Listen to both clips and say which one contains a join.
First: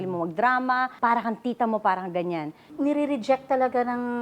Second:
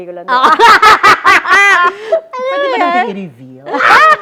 first; 2 cuts; at 0.9 s, 2.7 s

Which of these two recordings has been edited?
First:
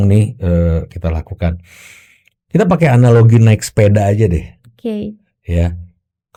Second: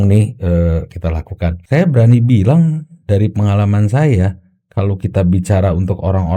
second; 1 cut; at 1.6 s

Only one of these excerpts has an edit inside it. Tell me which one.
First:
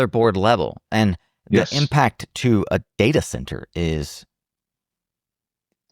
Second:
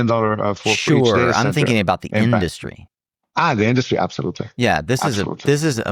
first; 1 cut; at 2.9 s

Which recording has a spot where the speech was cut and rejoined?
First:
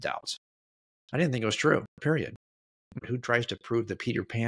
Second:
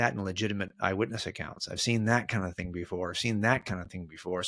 first; 1 cut; at 3.0 s

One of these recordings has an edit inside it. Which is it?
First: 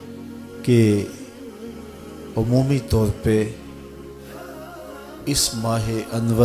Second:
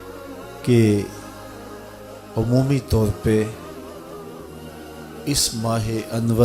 second; 2 cuts; at 3.5 s, 5.0 s

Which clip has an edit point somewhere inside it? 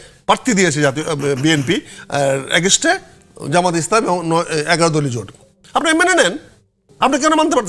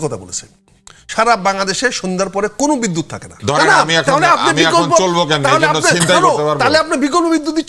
second; 1 cut; at 3.3 s

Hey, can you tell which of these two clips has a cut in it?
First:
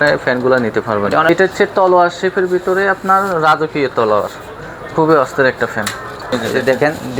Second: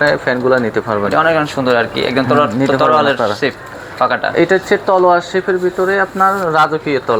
first; 2 cuts; at 1.3 s, 6.2 s

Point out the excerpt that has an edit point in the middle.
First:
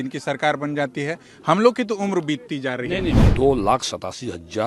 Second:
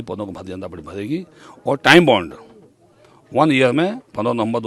first; 1 cut; at 3.2 s

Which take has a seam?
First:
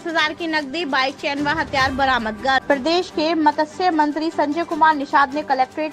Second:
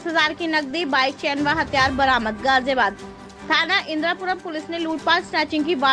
first; 1 cut; at 2.6 s

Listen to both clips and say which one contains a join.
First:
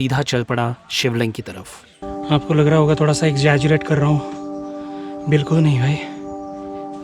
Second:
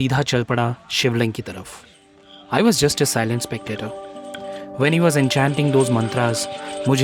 first; 1 cut; at 2.0 s

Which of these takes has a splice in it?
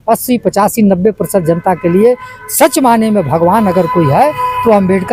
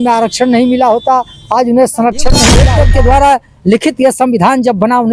second; 1 cut; at 2.6 s

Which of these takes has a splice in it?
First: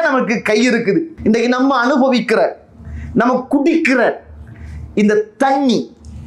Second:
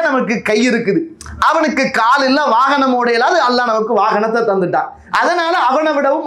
first; 1 cut; at 1.1 s

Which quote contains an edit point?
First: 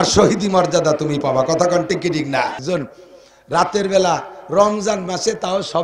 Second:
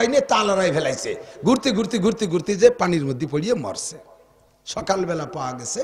first; 1 cut; at 2.6 s

